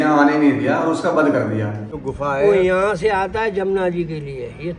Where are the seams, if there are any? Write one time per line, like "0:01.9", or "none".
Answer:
0:02.0